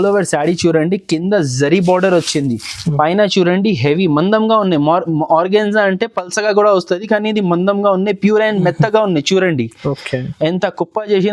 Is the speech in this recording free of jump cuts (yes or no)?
yes